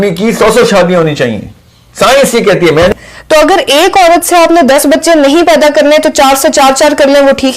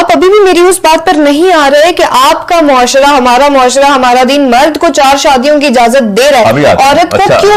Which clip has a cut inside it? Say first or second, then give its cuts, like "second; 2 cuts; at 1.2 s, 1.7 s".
first; 1 cut; at 2.9 s